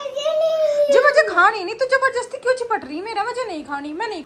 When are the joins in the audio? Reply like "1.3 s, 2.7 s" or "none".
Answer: none

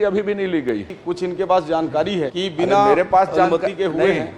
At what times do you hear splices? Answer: 0.9 s, 2.3 s

